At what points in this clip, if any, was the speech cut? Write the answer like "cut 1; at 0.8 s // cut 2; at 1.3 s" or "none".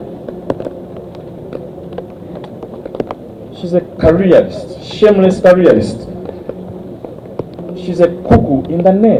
none